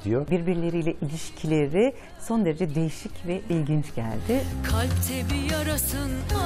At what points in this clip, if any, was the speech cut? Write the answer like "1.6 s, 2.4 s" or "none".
none